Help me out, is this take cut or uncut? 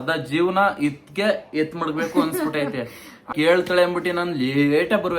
cut